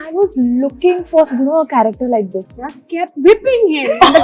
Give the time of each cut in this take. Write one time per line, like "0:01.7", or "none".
0:02.4